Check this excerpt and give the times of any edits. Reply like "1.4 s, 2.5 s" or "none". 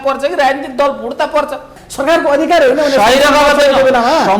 1.8 s